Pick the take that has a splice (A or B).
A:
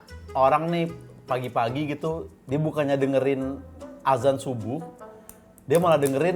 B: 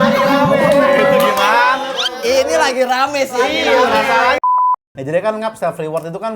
B